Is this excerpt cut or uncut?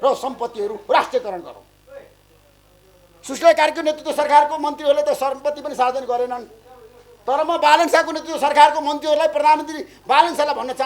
uncut